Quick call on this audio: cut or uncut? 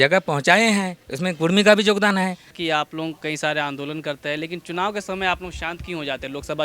cut